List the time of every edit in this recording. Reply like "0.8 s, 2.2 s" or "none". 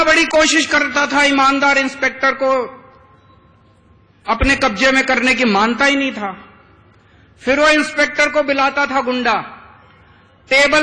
none